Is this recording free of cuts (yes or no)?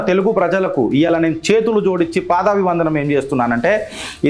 yes